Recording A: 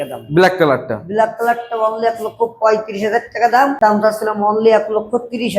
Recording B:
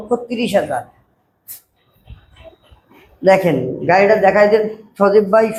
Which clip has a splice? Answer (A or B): A